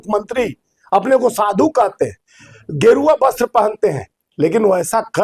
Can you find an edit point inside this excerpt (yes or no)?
no